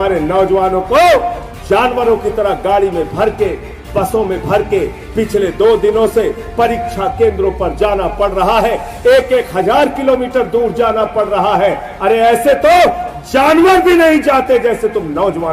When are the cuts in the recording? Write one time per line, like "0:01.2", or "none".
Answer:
none

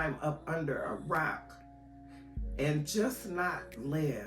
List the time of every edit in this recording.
none

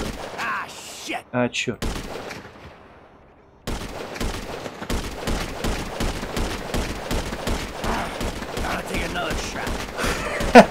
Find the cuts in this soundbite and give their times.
0:03.6

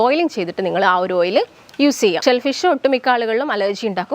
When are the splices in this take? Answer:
0:02.2

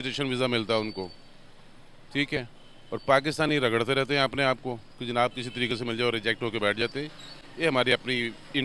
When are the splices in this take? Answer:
none

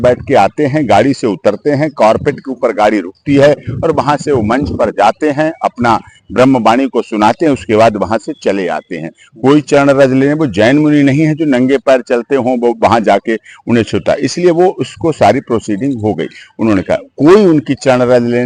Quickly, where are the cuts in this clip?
none

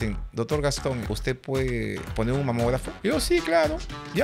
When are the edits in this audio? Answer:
0:01.0
0:02.1
0:02.9

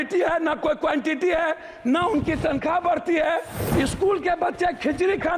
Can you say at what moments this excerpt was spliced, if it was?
0:03.5

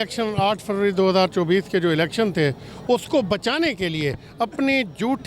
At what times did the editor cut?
none

